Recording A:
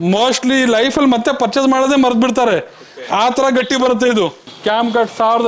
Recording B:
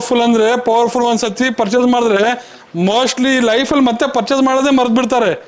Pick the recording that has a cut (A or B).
A